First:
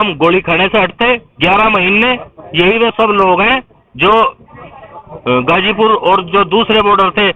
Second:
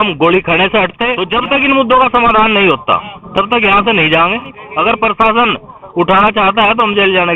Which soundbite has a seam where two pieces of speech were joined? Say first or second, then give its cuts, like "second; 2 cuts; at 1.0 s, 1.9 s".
second; 2 cuts; at 1.2 s, 4.6 s